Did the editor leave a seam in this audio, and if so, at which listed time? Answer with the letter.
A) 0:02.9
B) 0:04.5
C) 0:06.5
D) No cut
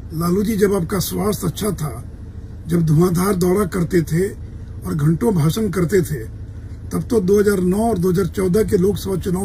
D